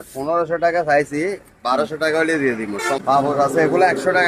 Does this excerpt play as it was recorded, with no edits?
no; 1 cut; at 3.0 s

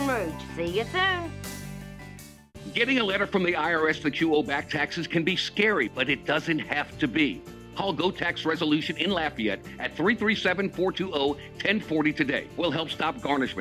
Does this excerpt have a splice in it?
yes; 1 cut; at 2.4 s

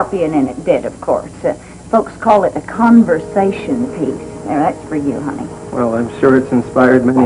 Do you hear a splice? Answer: yes; 1 cut; at 3.9 s

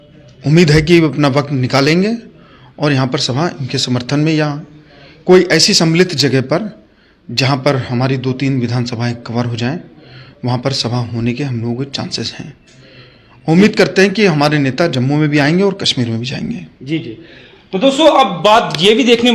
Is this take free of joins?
yes; 0 cuts

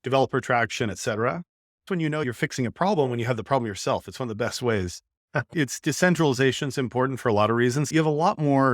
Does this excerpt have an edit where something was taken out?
yes; 3 cuts; at 2.2 s, 5.4 s, 7.9 s

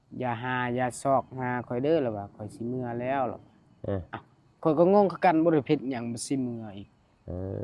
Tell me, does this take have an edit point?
no; 0 cuts

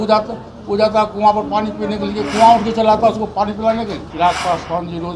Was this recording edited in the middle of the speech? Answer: yes; 1 cut; at 4.0 s

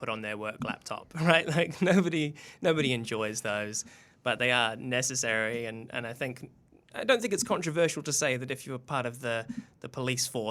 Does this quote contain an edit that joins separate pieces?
no; 0 cuts

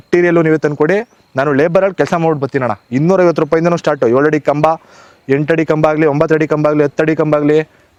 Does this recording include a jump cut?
no; 0 cuts

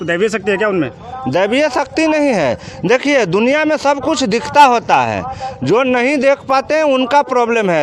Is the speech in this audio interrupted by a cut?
no; 0 cuts

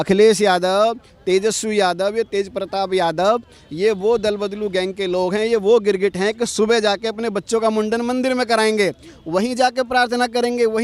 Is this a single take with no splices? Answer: yes; 0 cuts

